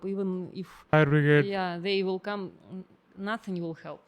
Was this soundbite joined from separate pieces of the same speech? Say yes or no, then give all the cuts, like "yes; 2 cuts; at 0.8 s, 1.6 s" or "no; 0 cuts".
yes; 1 cut; at 0.9 s